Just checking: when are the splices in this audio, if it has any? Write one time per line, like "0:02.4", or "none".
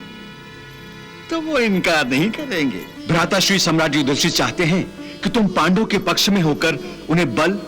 0:02.9